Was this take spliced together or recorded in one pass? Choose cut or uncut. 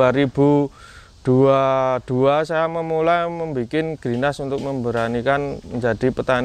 uncut